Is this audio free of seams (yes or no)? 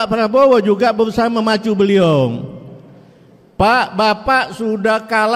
yes